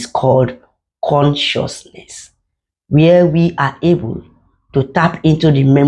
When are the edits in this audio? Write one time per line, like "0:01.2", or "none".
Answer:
none